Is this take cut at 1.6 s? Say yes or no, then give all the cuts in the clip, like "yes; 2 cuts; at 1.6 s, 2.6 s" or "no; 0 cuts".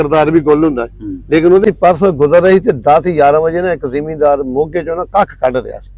yes; 1 cut; at 1.6 s